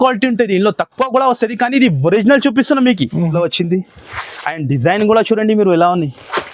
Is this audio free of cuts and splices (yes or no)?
no